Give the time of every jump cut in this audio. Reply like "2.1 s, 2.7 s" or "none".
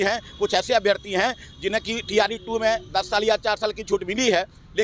none